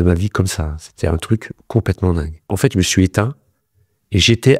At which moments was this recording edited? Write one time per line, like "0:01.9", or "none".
0:02.5